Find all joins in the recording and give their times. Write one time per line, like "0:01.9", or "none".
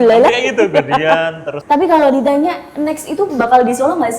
0:01.5